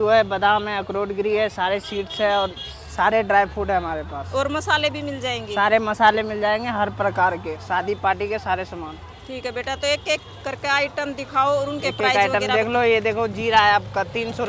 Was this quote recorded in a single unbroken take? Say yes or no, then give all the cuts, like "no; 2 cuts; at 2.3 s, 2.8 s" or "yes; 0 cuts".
yes; 0 cuts